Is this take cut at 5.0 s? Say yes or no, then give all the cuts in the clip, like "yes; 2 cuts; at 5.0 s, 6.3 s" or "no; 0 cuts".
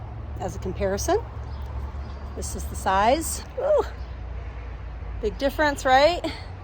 no; 1 cut; at 3.4 s